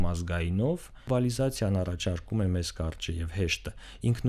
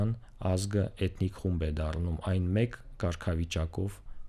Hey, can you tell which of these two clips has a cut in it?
first; 1 cut; at 1.1 s

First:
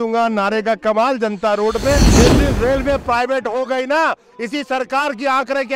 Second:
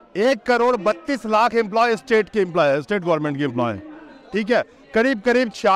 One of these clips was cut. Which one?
first; 1 cut; at 2.1 s

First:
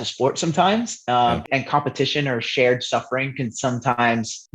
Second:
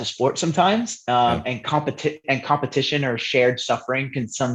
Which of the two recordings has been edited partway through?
first; 1 cut; at 1.4 s

